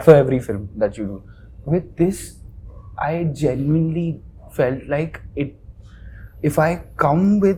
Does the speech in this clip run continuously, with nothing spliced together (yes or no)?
yes